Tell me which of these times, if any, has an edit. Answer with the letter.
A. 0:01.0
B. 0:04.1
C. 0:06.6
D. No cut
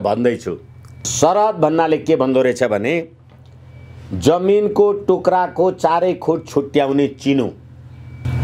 A